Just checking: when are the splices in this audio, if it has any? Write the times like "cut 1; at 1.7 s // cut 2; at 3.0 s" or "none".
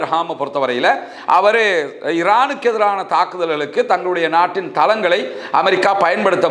none